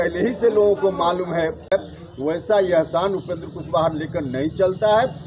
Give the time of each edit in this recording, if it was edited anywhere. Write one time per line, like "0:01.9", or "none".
0:01.7